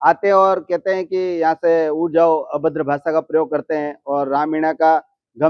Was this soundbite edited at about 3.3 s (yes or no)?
no